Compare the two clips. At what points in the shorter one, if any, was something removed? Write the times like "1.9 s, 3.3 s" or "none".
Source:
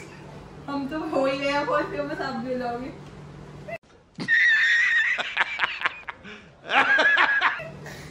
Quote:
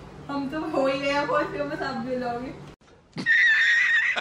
2.8 s